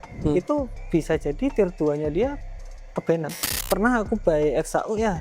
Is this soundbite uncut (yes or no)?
no